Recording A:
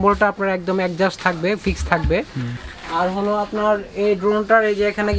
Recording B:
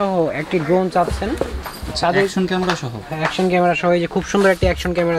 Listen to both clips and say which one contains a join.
A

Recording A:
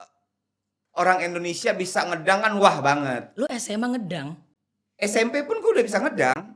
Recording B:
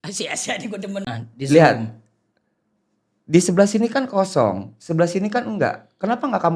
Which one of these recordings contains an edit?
B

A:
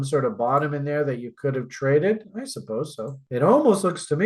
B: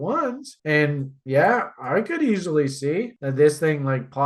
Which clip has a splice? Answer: A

